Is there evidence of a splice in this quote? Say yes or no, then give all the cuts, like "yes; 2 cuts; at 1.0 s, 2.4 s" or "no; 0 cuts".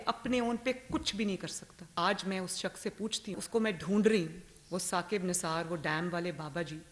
yes; 2 cuts; at 1.9 s, 3.4 s